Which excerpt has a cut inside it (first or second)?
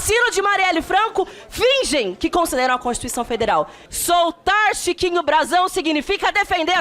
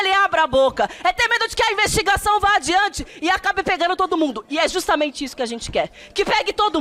first